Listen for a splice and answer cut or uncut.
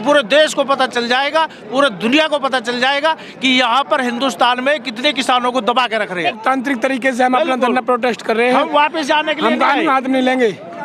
cut